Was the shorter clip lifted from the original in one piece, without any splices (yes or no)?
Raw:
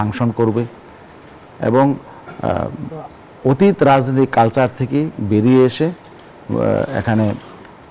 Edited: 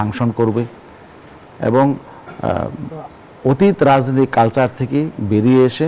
yes